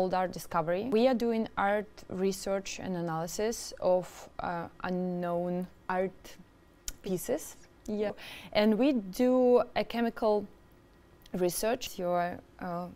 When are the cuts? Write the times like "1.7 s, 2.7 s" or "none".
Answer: 0.9 s, 5.8 s, 8.1 s, 11.9 s